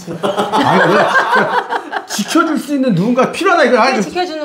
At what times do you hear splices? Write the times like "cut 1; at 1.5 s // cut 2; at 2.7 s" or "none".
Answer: none